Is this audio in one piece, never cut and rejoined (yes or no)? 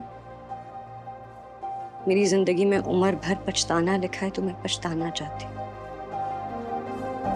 yes